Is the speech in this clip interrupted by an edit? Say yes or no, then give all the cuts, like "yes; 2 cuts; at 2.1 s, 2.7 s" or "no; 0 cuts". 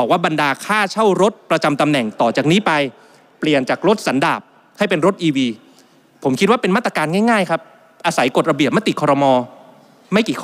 no; 0 cuts